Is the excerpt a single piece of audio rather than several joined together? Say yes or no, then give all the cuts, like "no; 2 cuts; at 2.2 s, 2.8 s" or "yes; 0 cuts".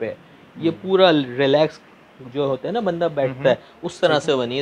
yes; 0 cuts